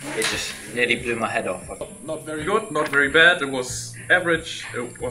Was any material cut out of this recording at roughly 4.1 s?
no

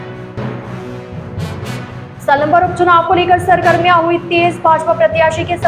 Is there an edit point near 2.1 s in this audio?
yes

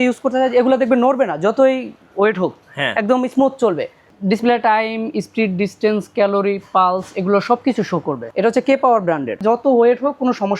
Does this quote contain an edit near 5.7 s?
no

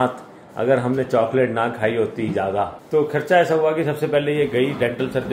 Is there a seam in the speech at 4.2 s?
no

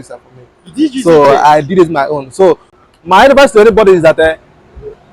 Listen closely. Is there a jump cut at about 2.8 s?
yes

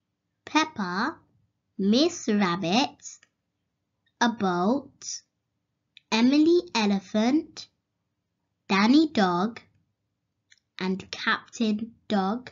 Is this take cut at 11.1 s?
yes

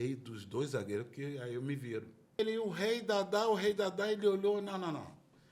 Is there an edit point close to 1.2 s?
no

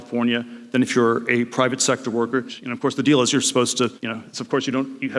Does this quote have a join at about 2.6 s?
no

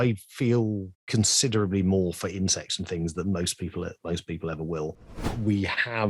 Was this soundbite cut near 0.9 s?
yes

